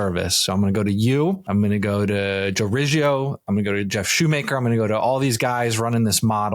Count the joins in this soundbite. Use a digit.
1